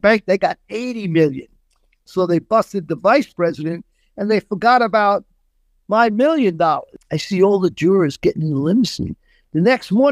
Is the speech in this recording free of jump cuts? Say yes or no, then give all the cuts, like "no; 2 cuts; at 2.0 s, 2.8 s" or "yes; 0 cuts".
no; 1 cut; at 6.9 s